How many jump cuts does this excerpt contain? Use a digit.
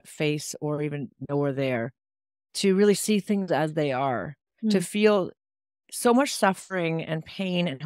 0